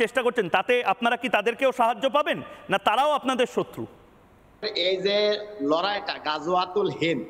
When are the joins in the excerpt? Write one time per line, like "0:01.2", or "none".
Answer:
0:04.7